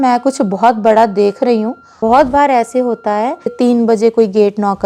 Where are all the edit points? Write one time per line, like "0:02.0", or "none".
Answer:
0:01.9
0:03.5

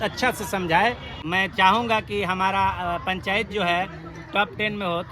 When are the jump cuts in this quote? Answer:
0:01.1

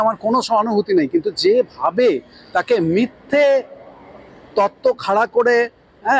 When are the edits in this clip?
none

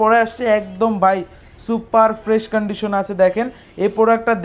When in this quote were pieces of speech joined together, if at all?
none

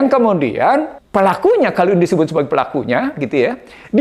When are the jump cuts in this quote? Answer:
0:01.0

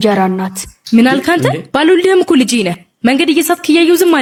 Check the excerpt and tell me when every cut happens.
none

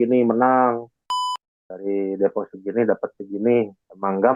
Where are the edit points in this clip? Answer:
0:01.2

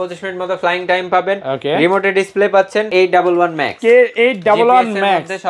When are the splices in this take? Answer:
0:02.9

